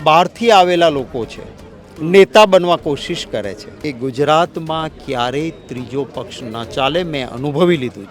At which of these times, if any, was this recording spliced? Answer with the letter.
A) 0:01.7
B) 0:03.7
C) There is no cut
B